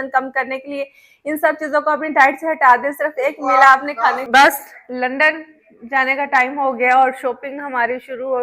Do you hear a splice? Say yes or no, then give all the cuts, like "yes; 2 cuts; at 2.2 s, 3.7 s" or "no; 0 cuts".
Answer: yes; 1 cut; at 4.2 s